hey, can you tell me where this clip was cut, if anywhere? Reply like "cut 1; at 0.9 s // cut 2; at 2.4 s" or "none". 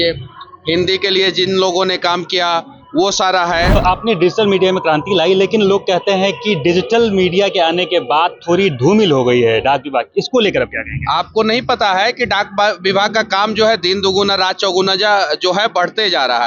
cut 1; at 3.8 s